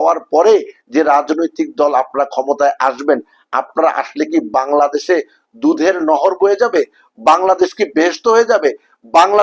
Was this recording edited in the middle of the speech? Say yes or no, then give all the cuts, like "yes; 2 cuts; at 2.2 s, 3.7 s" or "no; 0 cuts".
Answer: no; 0 cuts